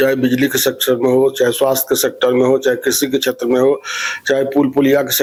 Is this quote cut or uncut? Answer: uncut